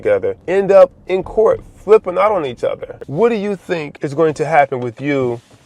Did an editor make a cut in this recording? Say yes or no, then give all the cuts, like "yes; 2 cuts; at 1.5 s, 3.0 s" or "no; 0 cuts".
yes; 1 cut; at 3.0 s